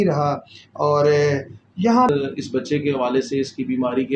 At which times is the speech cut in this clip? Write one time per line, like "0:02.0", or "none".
0:02.1